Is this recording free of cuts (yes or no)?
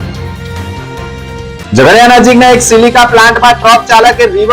no